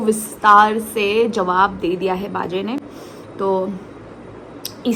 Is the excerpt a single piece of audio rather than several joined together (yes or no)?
yes